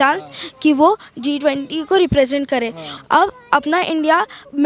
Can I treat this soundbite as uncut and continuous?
no; 1 cut; at 2.8 s

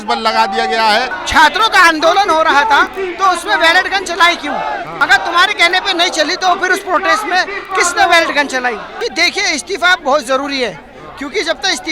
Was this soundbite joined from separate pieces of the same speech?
yes; 3 cuts; at 1.2 s, 4.9 s, 8.9 s

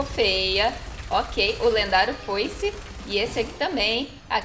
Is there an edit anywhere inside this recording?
no; 0 cuts

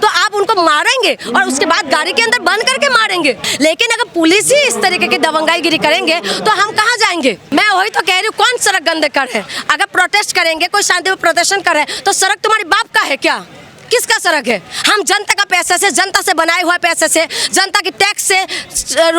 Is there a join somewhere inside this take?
yes; 2 cuts; at 3.5 s, 7.5 s

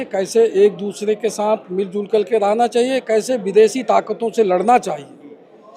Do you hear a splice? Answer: no; 0 cuts

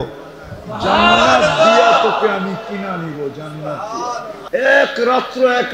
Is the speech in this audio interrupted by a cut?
yes; 1 cut; at 4.4 s

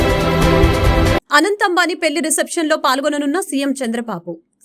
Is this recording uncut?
no; 1 cut; at 0.9 s

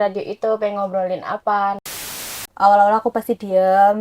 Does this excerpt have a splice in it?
yes; 1 cut; at 2.4 s

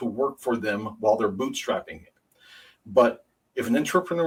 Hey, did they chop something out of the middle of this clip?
no; 0 cuts

